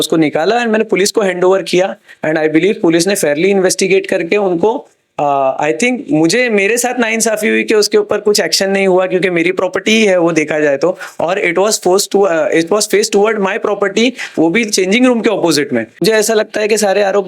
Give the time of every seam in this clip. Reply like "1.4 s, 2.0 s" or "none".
16.0 s